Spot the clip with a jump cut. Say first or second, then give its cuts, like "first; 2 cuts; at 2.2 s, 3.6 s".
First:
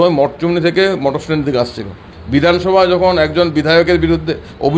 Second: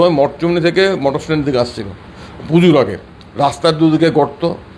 first; 1 cut; at 2.1 s